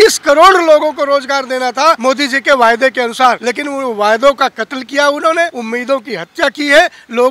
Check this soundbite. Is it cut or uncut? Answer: cut